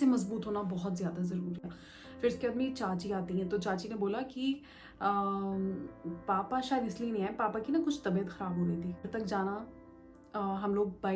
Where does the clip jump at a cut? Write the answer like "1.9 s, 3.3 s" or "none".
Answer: 1.8 s, 9.0 s